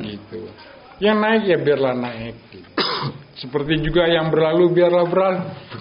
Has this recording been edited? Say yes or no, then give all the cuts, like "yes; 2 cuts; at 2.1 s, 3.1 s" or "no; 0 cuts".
no; 0 cuts